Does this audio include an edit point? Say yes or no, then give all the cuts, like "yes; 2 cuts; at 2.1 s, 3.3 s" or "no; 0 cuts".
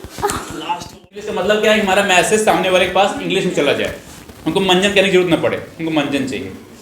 yes; 1 cut; at 1.1 s